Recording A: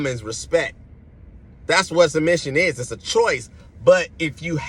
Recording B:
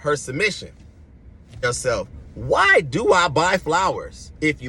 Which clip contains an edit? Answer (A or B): B